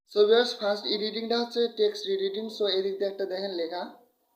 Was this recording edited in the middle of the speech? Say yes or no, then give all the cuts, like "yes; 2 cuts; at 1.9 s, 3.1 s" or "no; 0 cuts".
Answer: no; 0 cuts